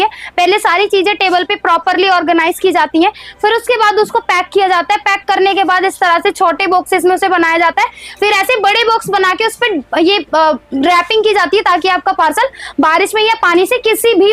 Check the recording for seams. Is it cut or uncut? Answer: uncut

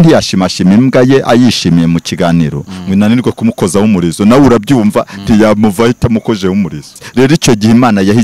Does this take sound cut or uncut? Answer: cut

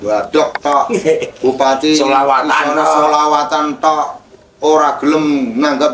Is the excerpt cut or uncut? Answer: uncut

